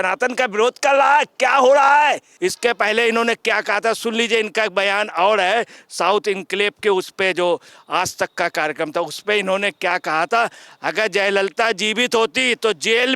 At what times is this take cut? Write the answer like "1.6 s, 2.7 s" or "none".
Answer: 2.3 s